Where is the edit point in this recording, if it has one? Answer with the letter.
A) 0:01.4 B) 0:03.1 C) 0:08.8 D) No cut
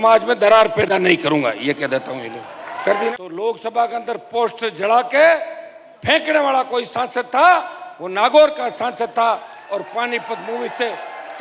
B